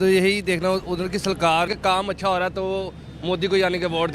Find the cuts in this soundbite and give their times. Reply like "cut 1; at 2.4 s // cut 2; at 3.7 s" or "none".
cut 1; at 1.7 s